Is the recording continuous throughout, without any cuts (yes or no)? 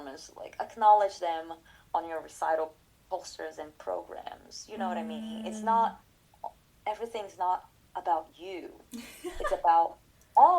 yes